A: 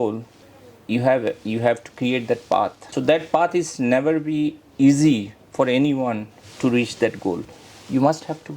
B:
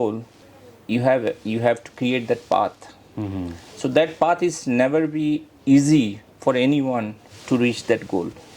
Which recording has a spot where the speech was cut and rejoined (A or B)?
A